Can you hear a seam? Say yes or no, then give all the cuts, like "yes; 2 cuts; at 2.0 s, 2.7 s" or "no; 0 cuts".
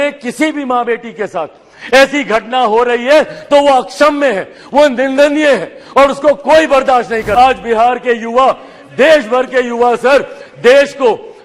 yes; 1 cut; at 7.3 s